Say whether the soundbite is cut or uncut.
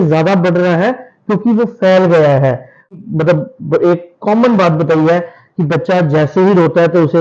cut